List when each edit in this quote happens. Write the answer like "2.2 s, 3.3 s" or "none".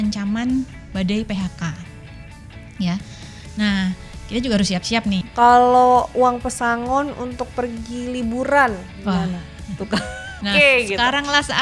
5.2 s, 10.4 s